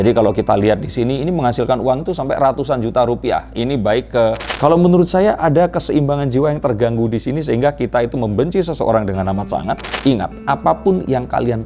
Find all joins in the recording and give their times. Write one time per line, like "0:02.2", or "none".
0:04.5
0:09.9